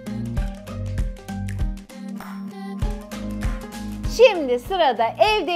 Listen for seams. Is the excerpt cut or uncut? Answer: cut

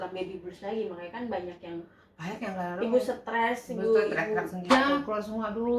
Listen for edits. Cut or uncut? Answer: cut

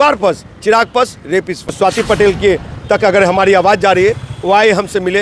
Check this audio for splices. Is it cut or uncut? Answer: cut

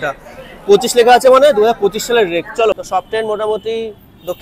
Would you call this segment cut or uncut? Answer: cut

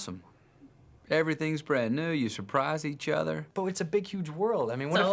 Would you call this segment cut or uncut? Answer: cut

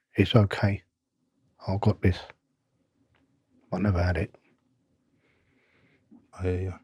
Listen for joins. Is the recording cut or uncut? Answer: uncut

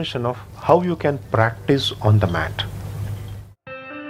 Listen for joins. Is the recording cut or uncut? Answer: uncut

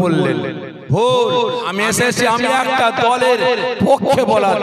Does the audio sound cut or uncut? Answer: cut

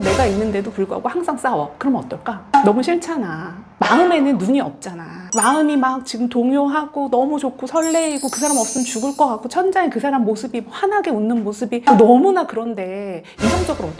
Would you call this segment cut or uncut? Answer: cut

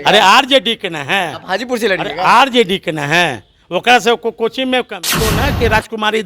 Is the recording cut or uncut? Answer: cut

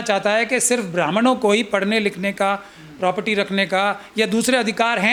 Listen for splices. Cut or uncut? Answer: uncut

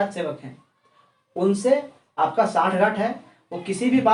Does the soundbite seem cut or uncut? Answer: uncut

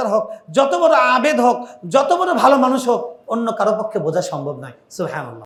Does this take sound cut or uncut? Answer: uncut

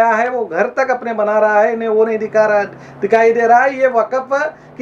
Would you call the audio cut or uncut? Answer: uncut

